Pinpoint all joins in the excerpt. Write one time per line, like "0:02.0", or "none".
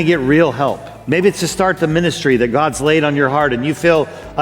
0:00.9

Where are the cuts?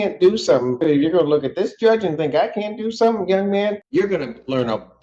0:00.8
0:03.8

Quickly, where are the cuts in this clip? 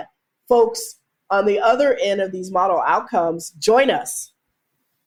none

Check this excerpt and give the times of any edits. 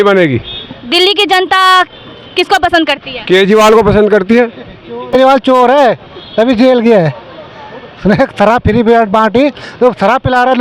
0:05.1

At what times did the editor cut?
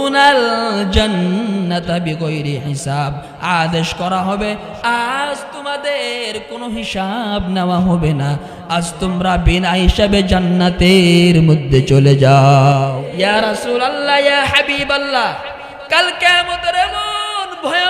0:13.0

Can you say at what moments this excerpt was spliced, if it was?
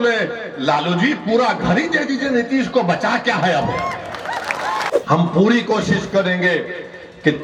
0:04.9

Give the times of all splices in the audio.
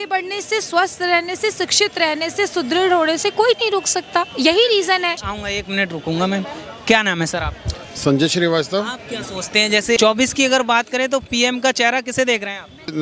none

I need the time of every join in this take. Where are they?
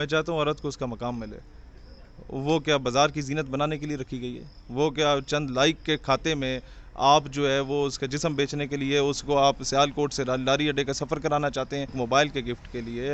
0:12.0

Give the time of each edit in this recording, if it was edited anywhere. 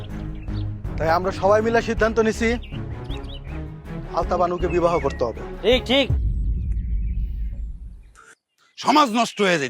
0:08.0

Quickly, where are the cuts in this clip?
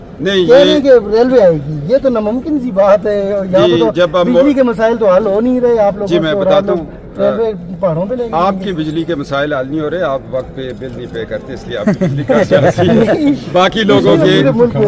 none

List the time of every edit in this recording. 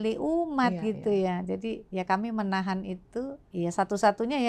0:03.4

